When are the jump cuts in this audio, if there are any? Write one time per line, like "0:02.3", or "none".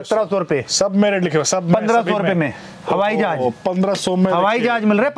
none